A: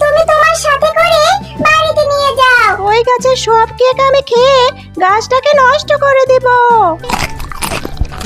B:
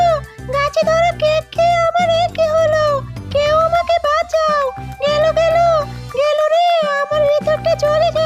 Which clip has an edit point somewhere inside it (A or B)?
A